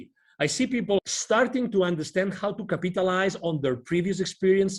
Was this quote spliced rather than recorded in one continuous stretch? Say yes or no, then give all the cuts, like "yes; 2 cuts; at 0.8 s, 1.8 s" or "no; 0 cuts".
yes; 1 cut; at 1.0 s